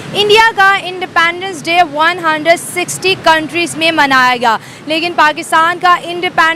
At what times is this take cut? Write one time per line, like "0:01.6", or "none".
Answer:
none